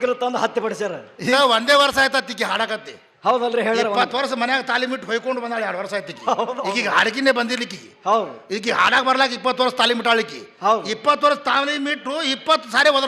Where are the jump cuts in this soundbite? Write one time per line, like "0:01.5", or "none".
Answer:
0:01.3